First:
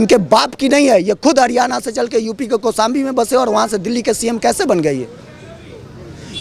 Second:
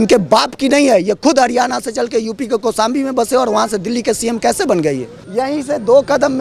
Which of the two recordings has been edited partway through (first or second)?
second